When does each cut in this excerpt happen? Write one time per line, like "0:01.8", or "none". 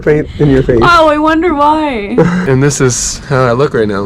0:02.4